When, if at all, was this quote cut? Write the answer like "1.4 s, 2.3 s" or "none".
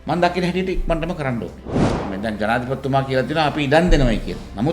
2.1 s